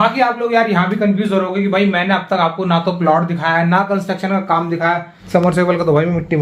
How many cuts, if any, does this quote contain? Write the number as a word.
one